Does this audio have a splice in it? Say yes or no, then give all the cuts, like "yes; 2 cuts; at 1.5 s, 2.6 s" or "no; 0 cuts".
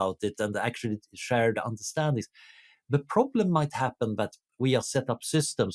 no; 0 cuts